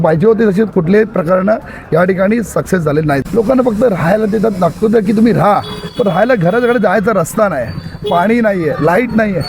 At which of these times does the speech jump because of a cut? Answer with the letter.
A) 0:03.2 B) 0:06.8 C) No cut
A